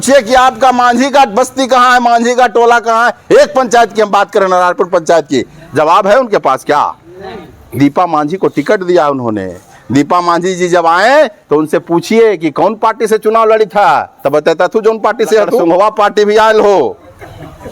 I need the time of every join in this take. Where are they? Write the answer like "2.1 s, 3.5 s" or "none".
15.6 s

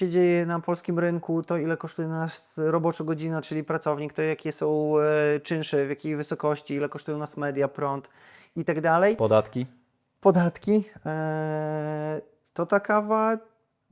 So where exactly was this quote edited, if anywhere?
none

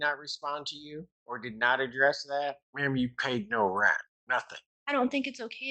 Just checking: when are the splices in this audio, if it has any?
1.1 s, 2.7 s, 4.4 s

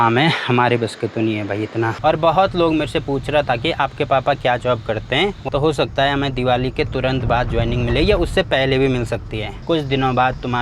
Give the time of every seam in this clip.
5.5 s, 9.5 s

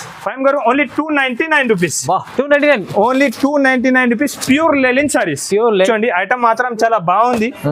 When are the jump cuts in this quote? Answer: 5.9 s

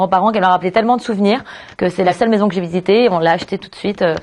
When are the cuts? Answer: none

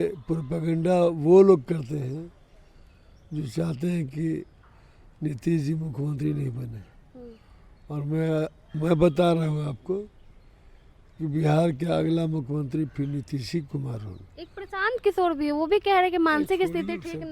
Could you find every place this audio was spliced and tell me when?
none

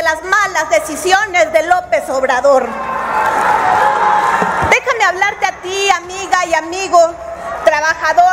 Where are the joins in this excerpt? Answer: none

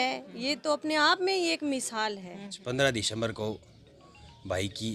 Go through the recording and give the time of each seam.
2.6 s

